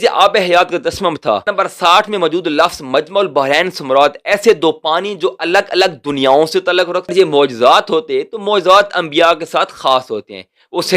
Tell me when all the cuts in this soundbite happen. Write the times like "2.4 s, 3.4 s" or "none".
1.5 s, 7.1 s